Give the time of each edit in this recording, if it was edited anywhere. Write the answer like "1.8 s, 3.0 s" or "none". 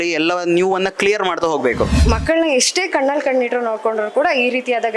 2.0 s